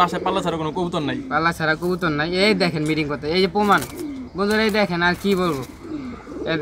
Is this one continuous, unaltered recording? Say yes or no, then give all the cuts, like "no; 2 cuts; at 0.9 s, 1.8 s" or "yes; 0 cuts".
yes; 0 cuts